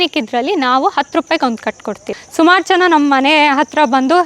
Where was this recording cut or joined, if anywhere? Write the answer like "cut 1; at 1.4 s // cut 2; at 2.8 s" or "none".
cut 1; at 2.2 s